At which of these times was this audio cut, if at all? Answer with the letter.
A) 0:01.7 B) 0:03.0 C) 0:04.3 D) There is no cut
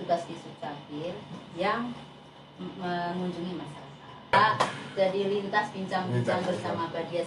C